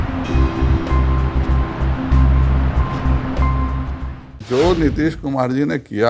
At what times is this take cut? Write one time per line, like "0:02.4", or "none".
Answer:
0:04.4